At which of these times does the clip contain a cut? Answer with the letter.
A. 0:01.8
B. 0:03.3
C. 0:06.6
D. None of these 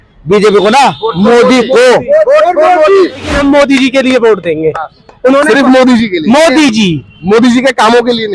B